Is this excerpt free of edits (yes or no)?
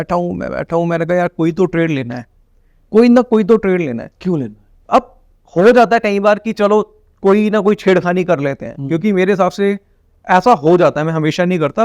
yes